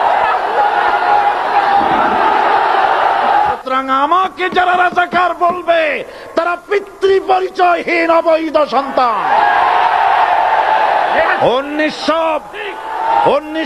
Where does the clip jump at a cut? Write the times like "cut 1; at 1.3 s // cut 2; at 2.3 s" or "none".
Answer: cut 1; at 3.4 s